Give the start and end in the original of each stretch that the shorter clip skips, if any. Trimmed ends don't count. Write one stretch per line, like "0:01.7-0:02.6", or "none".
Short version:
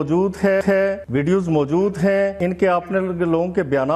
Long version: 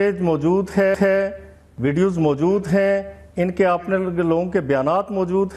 0:01.4-0:01.7
0:03.0-0:03.3